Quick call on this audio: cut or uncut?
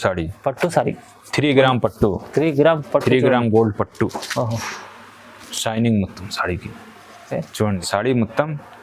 cut